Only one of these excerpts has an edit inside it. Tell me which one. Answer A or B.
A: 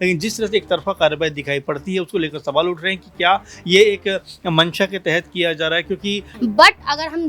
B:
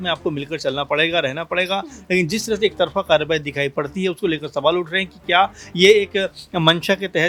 A